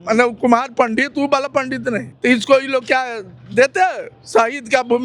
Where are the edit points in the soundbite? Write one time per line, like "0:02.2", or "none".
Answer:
0:02.1